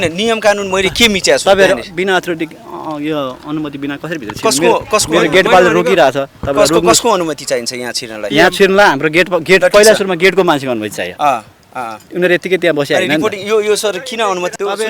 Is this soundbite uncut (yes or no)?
yes